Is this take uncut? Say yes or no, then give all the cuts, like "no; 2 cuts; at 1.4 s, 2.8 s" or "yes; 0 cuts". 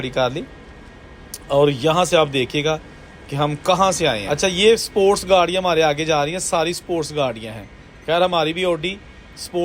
no; 1 cut; at 4.2 s